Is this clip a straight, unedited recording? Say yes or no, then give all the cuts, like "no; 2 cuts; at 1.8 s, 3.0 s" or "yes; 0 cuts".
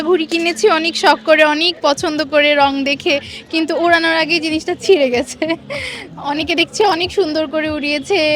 yes; 0 cuts